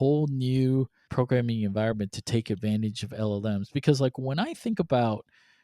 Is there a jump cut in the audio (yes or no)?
yes